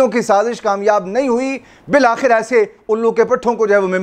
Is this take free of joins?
yes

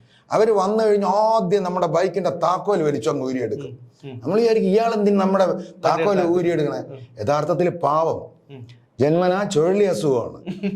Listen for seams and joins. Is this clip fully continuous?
yes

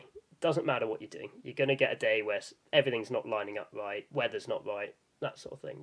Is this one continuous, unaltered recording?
no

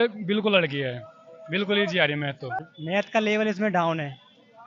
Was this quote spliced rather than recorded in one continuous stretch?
yes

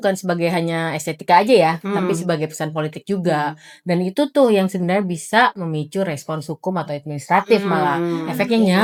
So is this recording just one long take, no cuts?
yes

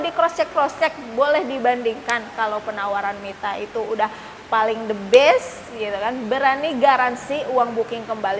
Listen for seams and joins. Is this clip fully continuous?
yes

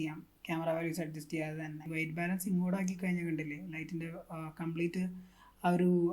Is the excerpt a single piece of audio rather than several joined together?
no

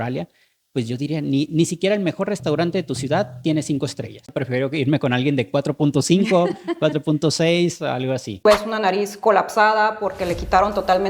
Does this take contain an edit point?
yes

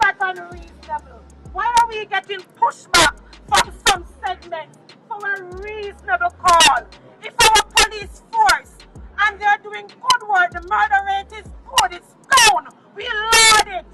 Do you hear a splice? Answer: no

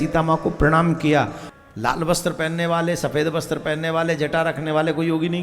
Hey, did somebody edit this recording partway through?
yes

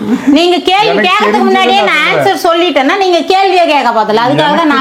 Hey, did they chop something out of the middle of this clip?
no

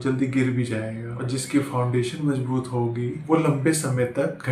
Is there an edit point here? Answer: no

